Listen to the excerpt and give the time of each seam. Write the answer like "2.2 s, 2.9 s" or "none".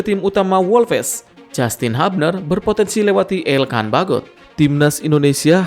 4.4 s